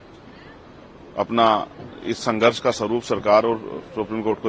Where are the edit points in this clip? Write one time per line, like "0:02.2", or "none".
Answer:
none